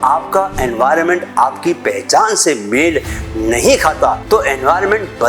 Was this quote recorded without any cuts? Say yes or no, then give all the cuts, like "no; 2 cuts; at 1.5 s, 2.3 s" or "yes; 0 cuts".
no; 1 cut; at 4.2 s